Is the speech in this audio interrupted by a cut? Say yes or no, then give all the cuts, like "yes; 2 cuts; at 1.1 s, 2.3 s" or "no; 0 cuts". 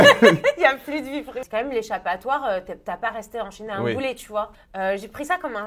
yes; 2 cuts; at 1.4 s, 4.5 s